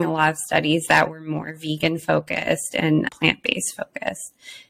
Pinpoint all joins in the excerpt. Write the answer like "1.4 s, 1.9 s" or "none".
none